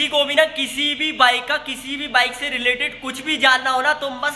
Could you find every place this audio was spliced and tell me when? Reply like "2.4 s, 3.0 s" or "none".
none